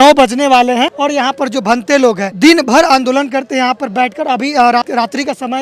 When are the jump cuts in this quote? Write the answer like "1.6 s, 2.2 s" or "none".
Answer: 0.9 s, 2.3 s, 4.8 s